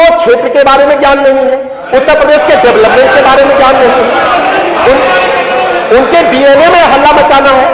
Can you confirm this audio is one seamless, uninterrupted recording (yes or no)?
yes